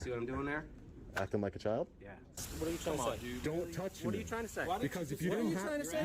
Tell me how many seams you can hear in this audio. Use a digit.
1